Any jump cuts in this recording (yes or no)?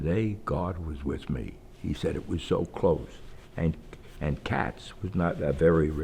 no